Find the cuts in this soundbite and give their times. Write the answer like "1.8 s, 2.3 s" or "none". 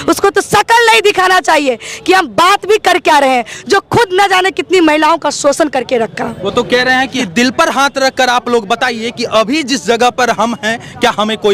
none

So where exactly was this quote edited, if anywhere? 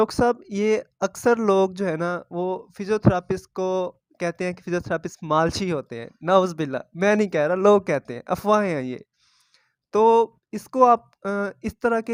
none

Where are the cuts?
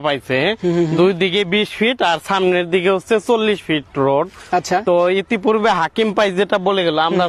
none

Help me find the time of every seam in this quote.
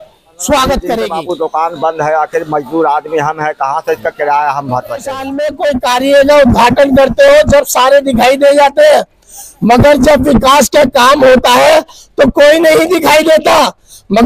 1.2 s, 5.4 s

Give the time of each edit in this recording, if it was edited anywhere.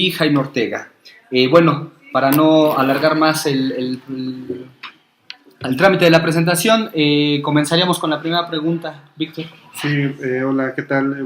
7.8 s

